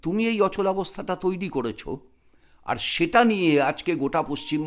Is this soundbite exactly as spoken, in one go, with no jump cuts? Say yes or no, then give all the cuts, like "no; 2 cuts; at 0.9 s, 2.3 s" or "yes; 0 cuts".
yes; 0 cuts